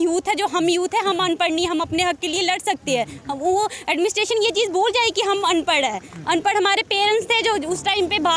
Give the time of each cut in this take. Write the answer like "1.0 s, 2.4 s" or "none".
none